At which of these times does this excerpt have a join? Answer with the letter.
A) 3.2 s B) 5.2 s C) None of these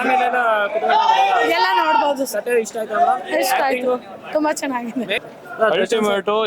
B